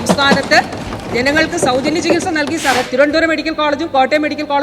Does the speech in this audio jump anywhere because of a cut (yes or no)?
yes